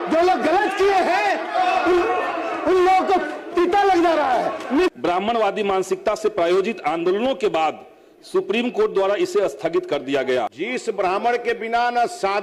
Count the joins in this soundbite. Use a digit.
2